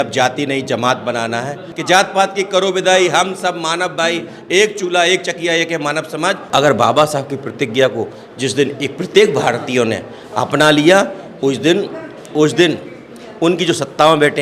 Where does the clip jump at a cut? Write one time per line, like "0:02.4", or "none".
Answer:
0:01.7
0:06.4